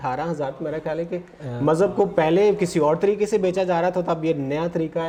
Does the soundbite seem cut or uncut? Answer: uncut